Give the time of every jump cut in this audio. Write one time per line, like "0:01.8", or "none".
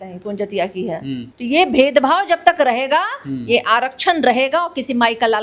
0:01.3